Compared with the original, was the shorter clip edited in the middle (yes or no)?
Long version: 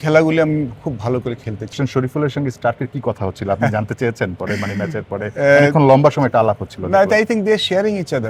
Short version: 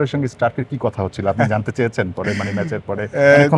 no